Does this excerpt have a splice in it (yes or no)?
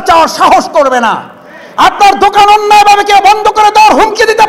no